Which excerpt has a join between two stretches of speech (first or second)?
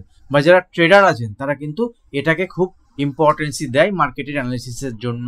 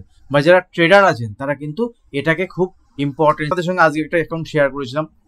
second